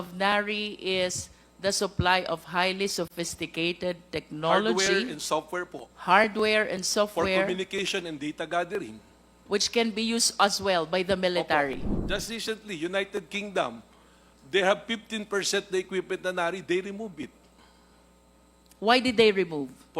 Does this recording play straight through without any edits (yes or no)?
no